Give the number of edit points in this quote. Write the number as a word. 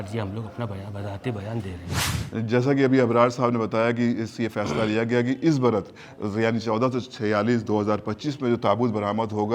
one